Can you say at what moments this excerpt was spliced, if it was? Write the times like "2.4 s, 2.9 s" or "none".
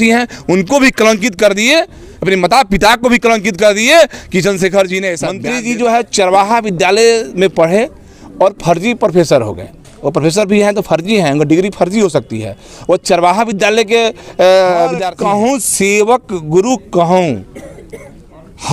5.3 s, 15.1 s